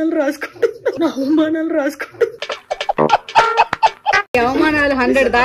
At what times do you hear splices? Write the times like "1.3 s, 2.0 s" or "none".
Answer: 1.0 s, 2.3 s, 4.3 s